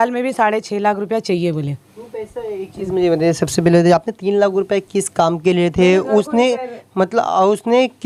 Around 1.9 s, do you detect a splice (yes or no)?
no